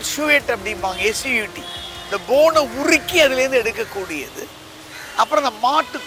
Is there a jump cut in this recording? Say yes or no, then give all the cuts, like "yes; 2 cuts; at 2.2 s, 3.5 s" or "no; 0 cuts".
no; 0 cuts